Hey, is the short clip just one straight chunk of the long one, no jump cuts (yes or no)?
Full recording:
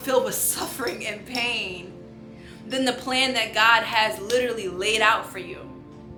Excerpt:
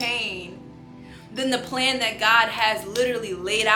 yes